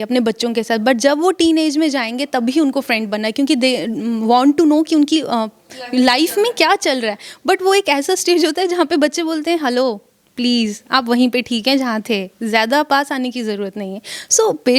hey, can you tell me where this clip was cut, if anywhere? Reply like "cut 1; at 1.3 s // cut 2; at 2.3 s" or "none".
none